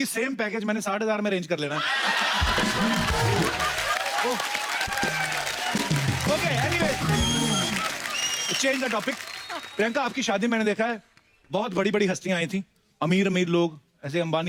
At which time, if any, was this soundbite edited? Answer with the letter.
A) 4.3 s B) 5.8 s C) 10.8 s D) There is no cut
D